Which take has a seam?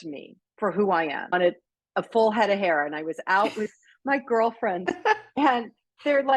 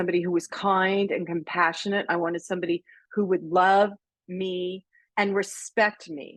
first; 1 cut; at 1.3 s

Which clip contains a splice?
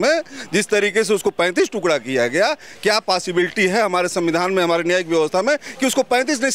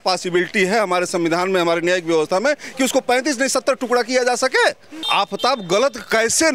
second; 1 cut; at 5.0 s

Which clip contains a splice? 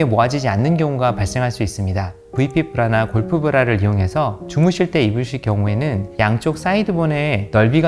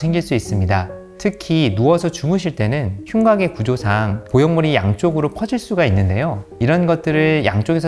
first; 1 cut; at 2.3 s

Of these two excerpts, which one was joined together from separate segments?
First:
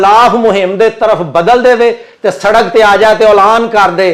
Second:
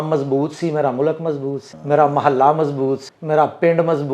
second; 2 cuts; at 1.7 s, 3.1 s

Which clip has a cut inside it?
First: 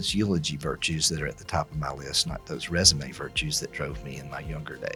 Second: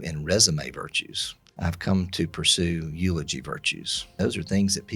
second; 2 cuts; at 1.6 s, 4.1 s

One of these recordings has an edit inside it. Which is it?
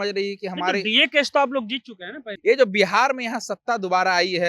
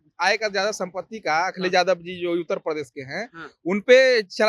first; 1 cut; at 2.3 s

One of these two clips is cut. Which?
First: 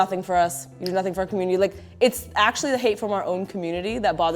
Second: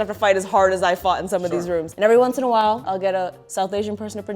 second; 2 cuts; at 1.9 s, 2.8 s

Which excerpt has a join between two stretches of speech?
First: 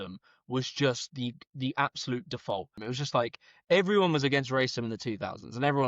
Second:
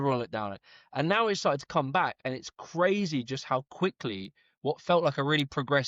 first; 1 cut; at 2.8 s

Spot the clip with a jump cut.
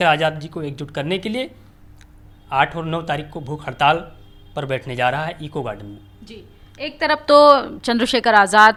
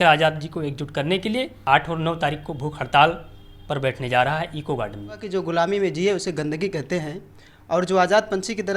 second; 2 cuts; at 1.6 s, 5.2 s

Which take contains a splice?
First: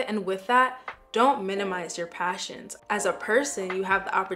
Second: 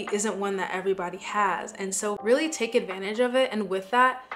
first; 1 cut; at 2.7 s

